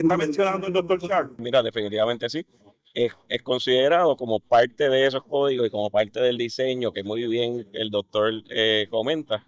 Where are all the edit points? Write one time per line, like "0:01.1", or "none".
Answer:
0:01.4